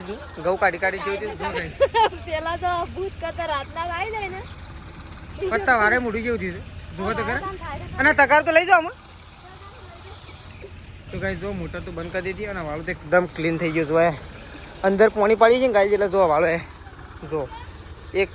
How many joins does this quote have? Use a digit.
0